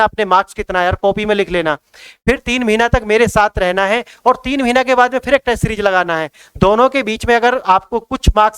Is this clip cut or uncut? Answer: uncut